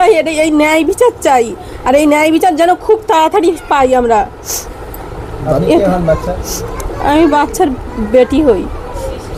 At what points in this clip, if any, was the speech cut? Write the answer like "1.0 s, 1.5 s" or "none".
none